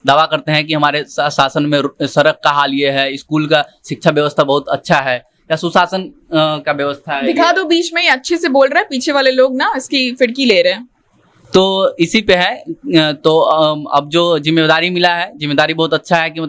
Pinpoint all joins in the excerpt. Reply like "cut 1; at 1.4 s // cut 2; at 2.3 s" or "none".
none